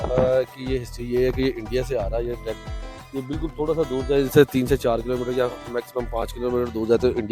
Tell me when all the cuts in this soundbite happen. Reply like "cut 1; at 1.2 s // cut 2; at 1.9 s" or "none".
none